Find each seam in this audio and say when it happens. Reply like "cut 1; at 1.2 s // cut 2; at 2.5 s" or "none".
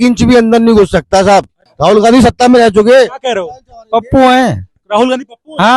cut 1; at 1.6 s